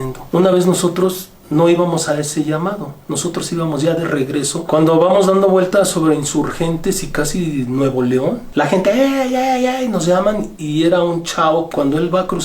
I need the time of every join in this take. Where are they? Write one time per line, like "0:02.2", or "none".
0:04.6
0:11.7